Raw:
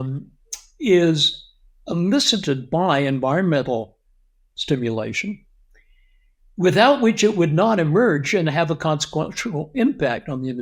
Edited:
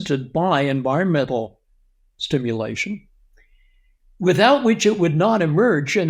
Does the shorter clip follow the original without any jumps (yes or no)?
yes